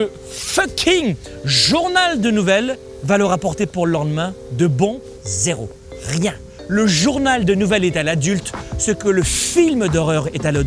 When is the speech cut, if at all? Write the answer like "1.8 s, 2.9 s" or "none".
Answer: 2.9 s, 5.0 s, 6.5 s